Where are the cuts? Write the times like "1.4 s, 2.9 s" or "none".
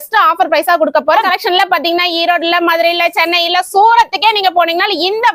1.3 s

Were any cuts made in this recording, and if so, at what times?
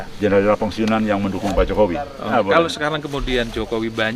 2.3 s

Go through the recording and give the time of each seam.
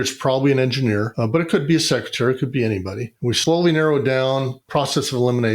3.4 s, 4.6 s

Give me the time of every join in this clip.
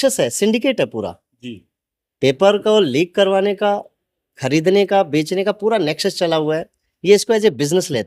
none

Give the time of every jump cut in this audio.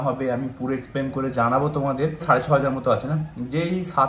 2.2 s

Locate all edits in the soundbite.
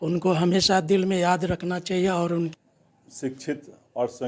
2.5 s

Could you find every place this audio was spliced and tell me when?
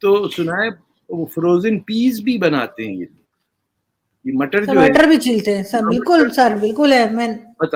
none

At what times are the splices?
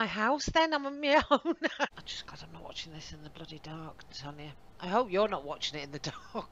2.0 s

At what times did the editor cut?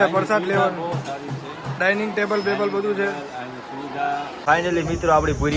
4.3 s

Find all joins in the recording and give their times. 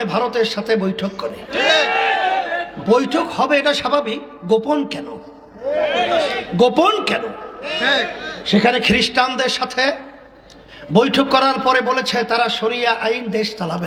none

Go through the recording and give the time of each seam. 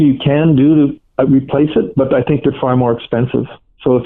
none

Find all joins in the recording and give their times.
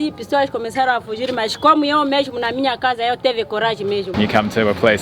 4.1 s

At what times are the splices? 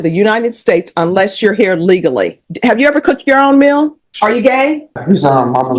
2.4 s, 4.0 s, 5.0 s

